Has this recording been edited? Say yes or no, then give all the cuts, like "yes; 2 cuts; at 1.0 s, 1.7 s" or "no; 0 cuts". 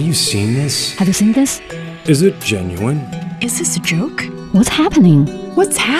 no; 0 cuts